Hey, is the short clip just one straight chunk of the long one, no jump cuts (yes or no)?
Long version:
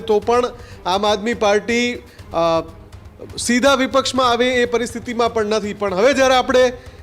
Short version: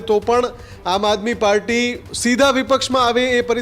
no